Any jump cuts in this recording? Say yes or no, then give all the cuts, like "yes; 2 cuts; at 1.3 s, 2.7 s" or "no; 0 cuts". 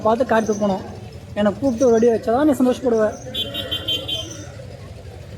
no; 0 cuts